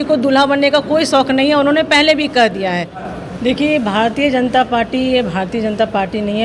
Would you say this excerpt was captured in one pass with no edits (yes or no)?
no